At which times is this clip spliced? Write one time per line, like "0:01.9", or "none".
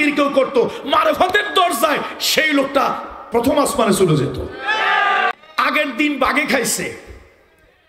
0:05.3